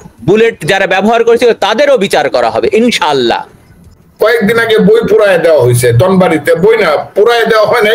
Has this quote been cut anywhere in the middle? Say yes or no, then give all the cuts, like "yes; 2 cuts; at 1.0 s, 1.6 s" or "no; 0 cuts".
yes; 1 cut; at 4.0 s